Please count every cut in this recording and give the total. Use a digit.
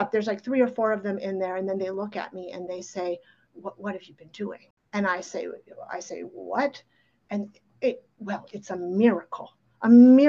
1